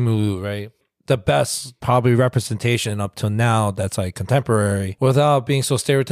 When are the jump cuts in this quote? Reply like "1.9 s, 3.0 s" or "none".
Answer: 4.9 s